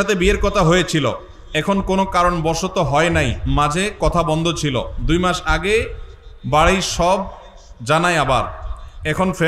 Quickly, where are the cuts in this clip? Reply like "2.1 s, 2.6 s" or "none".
none